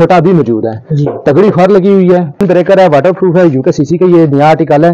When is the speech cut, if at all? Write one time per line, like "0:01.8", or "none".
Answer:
0:02.4